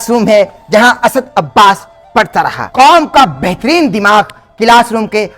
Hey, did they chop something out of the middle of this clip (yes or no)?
yes